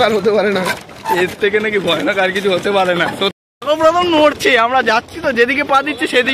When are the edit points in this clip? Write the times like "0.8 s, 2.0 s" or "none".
3.4 s

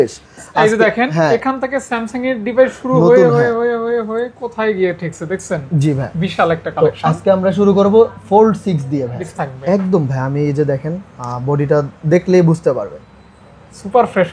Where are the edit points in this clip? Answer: 9.3 s

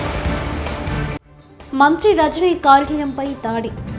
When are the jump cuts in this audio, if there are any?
1.4 s

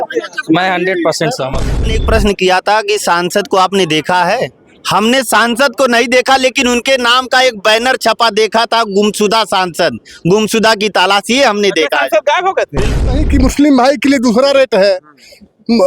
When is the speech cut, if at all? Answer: 1.7 s, 13.1 s

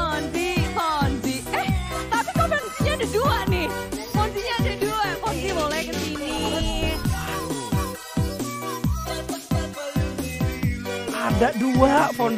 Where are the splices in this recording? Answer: none

